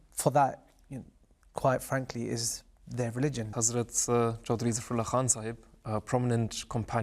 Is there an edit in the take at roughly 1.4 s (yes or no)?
no